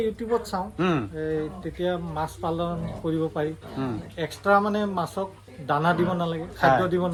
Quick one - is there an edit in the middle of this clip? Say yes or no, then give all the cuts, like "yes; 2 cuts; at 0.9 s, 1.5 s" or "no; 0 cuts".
no; 0 cuts